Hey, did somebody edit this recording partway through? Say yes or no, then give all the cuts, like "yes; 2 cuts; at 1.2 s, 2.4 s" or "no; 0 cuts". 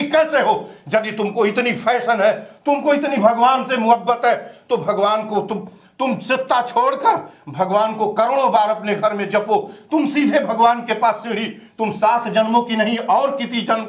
no; 0 cuts